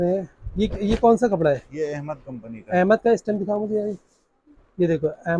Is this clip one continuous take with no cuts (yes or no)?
yes